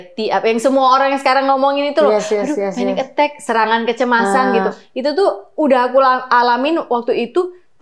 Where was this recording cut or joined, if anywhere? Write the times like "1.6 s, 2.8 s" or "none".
none